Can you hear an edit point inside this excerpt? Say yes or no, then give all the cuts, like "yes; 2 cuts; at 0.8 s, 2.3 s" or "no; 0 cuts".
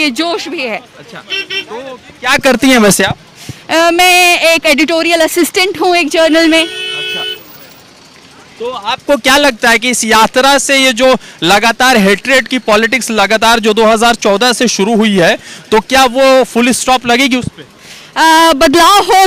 no; 0 cuts